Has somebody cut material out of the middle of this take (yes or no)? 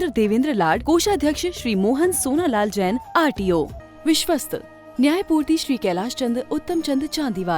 yes